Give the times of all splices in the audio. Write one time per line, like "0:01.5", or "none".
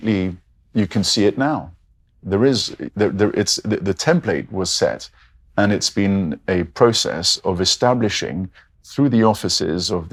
none